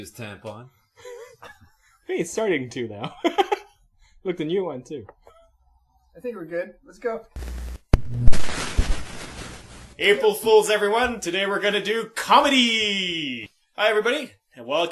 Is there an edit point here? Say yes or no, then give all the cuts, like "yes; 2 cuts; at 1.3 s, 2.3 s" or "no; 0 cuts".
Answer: no; 0 cuts